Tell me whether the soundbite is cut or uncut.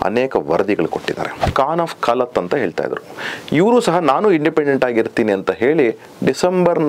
cut